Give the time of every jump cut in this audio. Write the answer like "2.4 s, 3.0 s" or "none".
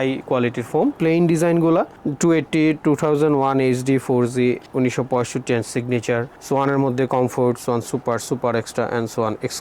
1.0 s